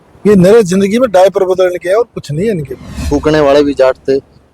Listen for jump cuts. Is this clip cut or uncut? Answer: cut